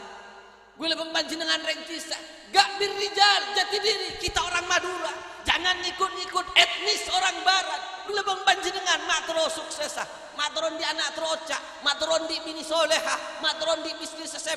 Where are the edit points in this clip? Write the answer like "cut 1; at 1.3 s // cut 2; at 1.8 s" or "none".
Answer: cut 1; at 8.1 s